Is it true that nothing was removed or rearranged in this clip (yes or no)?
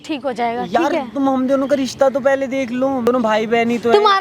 no